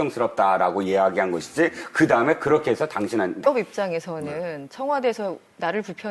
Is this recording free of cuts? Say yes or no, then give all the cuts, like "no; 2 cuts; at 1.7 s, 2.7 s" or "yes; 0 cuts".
yes; 0 cuts